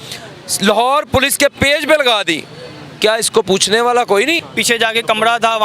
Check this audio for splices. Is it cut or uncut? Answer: cut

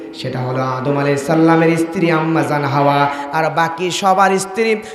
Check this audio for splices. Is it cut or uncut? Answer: uncut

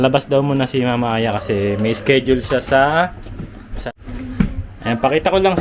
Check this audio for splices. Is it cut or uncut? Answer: cut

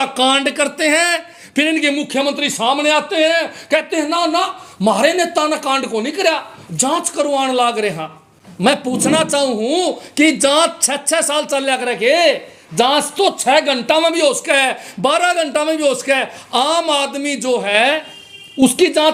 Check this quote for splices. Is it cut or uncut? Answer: uncut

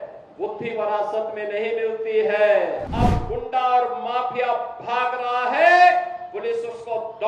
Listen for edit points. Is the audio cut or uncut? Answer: cut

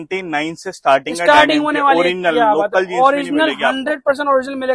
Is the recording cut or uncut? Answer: uncut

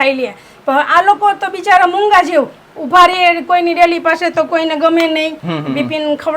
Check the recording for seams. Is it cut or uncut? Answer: cut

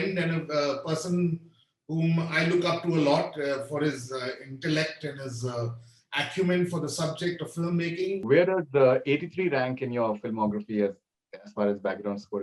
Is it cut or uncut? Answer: cut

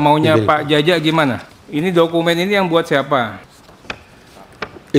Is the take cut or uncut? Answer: cut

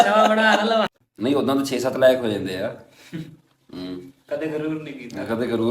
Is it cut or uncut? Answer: cut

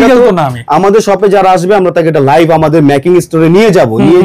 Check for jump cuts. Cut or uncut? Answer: uncut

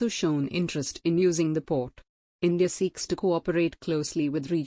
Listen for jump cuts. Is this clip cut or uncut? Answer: uncut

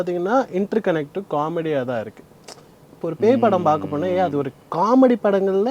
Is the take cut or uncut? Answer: uncut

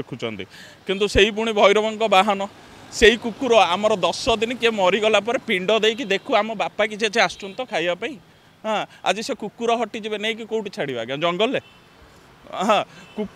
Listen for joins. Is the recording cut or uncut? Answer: uncut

